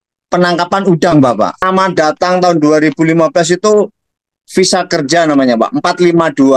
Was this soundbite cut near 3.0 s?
no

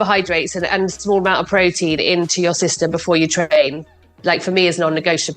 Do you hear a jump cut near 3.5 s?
yes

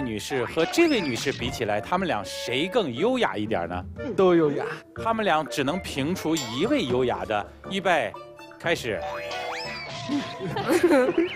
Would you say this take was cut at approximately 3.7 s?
no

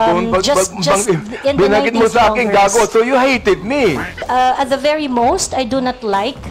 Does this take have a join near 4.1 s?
yes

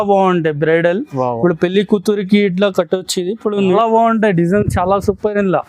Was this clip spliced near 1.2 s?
no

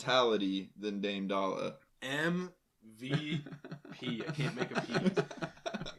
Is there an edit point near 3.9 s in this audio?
no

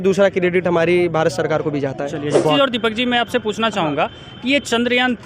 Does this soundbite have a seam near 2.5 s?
yes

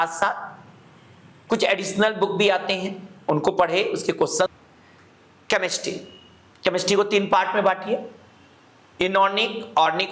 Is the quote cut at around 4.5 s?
yes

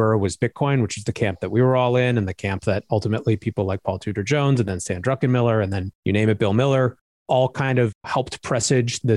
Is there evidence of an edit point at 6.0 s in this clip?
no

